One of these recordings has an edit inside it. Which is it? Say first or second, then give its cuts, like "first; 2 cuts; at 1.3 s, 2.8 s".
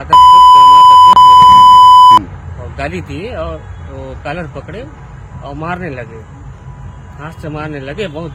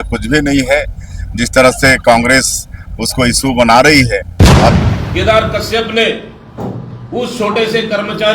second; 1 cut; at 4.8 s